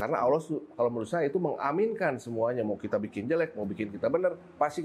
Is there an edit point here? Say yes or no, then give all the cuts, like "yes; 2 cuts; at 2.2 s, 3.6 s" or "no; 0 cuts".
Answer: no; 0 cuts